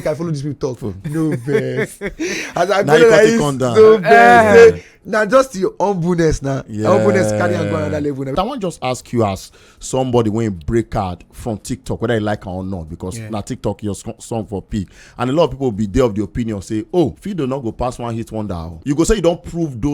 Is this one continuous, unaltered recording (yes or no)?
no